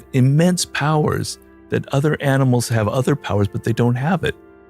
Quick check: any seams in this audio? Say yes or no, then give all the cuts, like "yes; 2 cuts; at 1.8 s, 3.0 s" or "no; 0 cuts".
no; 0 cuts